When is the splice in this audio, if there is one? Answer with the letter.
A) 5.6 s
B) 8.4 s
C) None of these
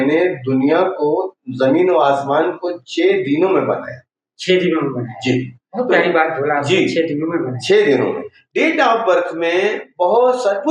B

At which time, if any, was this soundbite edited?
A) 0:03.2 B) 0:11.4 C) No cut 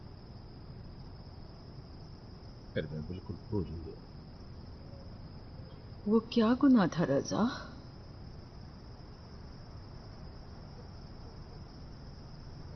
B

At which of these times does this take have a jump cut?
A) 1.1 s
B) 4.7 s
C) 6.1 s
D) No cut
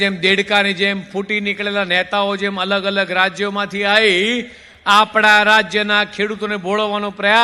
D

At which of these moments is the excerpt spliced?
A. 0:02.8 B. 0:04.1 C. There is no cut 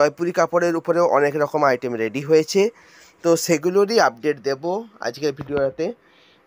C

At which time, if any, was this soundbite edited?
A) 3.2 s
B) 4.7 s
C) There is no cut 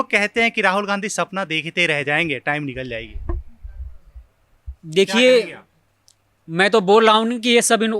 C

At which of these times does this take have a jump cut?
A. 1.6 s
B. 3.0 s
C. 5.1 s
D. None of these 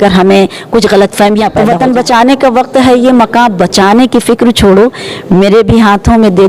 A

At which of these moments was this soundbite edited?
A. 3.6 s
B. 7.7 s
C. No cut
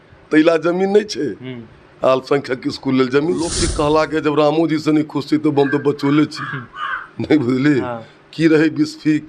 A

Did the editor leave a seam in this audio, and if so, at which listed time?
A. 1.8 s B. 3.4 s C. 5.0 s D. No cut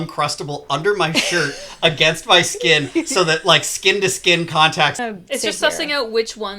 C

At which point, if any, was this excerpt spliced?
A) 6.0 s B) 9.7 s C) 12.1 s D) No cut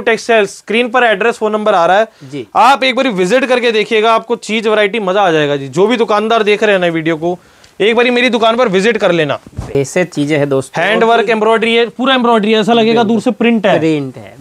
B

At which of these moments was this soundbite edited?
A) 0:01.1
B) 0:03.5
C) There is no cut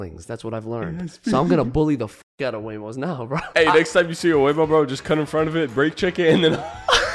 B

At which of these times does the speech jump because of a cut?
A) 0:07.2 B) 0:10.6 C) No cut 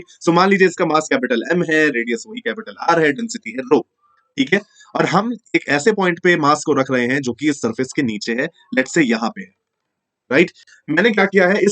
B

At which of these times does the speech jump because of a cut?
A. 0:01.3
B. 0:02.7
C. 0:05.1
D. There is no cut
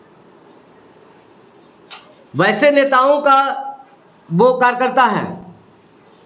D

